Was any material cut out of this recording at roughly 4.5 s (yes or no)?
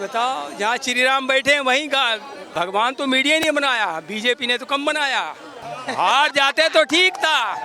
no